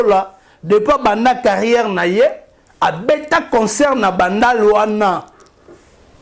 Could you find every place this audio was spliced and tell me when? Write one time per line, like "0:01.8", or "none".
none